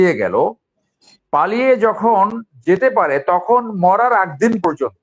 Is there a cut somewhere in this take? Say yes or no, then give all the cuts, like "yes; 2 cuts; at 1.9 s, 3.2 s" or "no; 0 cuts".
no; 0 cuts